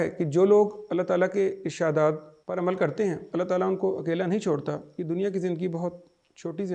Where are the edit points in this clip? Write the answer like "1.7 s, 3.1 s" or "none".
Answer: 2.3 s